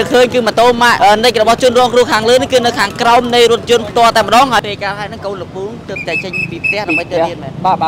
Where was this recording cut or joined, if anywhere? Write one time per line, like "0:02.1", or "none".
0:00.9
0:04.6